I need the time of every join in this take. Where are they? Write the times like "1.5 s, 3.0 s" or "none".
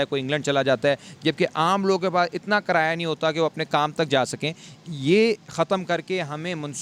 none